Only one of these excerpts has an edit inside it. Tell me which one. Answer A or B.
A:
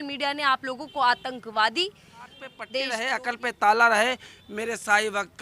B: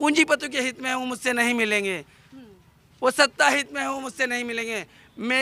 A